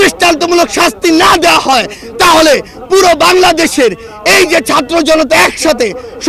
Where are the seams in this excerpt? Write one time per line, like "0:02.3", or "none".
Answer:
none